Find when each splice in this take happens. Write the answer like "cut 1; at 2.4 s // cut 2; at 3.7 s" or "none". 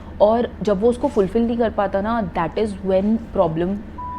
none